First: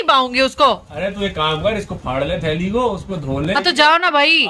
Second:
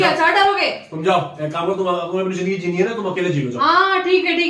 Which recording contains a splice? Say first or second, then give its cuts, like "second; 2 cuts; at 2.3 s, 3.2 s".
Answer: first; 1 cut; at 3.5 s